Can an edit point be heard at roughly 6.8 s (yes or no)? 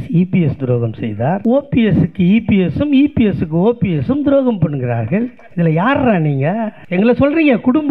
yes